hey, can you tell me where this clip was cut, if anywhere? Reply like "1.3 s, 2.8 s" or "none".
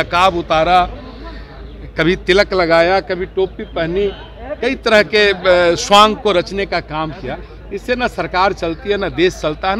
none